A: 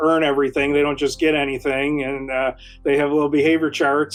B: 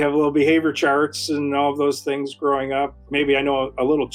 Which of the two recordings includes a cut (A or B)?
B